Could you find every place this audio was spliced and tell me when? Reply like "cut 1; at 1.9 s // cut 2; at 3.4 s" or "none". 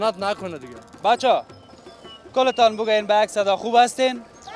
cut 1; at 0.9 s